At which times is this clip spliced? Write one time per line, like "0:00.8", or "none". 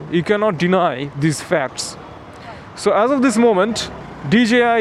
none